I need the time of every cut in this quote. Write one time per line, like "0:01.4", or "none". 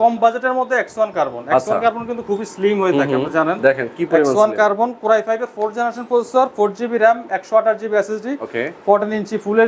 none